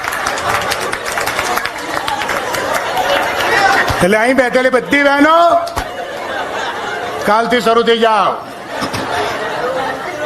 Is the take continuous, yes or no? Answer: yes